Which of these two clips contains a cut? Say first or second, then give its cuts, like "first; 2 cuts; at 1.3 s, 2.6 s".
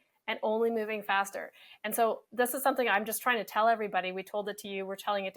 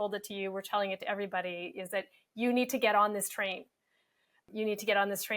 second; 1 cut; at 4.4 s